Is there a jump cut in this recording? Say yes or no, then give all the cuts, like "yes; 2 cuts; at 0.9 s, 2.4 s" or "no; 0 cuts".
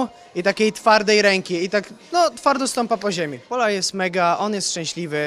yes; 1 cut; at 3.5 s